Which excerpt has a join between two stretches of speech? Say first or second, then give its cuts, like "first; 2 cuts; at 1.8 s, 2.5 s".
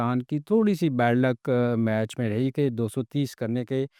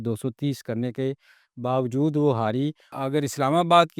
second; 1 cut; at 2.9 s